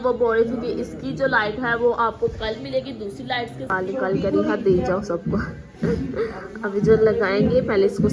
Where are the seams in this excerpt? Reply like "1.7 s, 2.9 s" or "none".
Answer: 3.6 s